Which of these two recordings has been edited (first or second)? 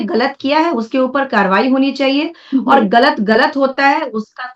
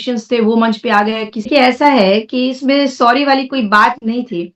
second